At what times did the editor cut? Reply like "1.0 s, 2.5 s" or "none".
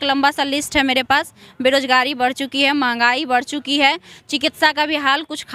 none